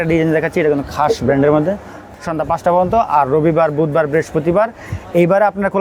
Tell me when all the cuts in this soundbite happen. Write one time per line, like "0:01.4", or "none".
0:02.0